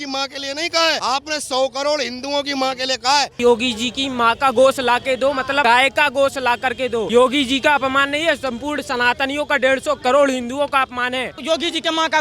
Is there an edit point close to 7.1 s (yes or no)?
yes